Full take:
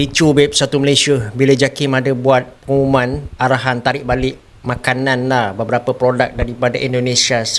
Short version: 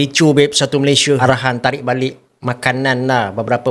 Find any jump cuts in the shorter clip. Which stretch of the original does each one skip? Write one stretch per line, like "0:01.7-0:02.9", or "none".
0:01.2-0:03.4